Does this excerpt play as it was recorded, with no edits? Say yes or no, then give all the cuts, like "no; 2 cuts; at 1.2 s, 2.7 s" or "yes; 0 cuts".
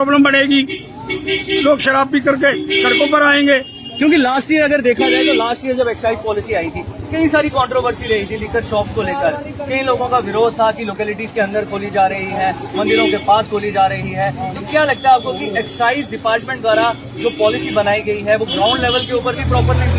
yes; 0 cuts